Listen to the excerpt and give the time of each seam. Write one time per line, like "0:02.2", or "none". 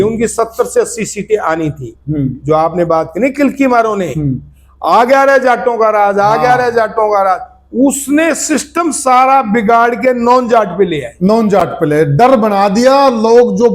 none